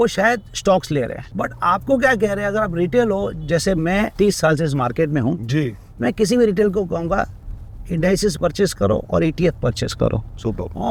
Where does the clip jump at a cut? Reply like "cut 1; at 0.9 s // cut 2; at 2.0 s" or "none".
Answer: none